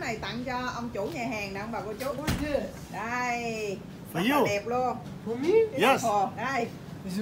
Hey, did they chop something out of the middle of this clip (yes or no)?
no